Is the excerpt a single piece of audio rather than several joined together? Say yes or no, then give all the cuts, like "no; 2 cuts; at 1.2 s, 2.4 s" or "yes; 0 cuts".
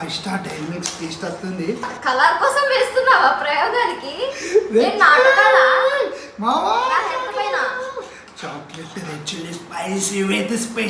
no; 2 cuts; at 1.9 s, 6.0 s